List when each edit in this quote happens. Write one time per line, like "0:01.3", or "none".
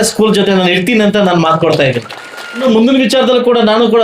0:02.6